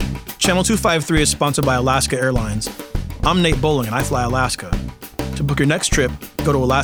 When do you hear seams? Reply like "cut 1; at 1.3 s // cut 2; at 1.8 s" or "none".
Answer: none

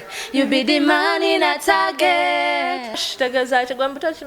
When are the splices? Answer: cut 1; at 3.1 s

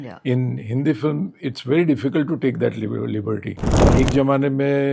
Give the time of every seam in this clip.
cut 1; at 3.7 s

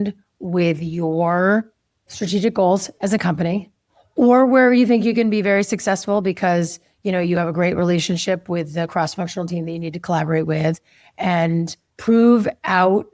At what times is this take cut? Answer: cut 1; at 11.8 s

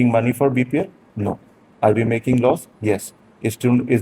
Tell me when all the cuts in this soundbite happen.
none

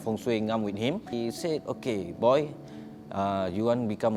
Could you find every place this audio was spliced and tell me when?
cut 1; at 1.1 s

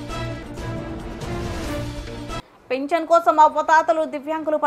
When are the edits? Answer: cut 1; at 2.4 s

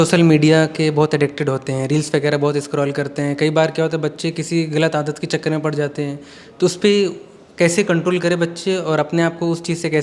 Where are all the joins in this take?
none

